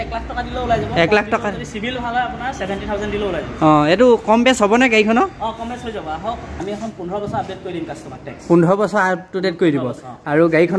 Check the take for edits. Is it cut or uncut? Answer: cut